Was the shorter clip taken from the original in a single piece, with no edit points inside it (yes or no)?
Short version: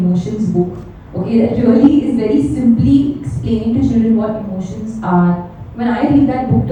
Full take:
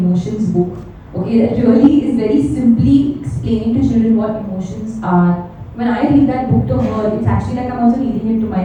yes